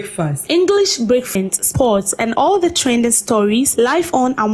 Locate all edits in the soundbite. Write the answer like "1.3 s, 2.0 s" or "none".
1.3 s